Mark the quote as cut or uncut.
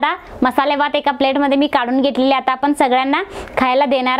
uncut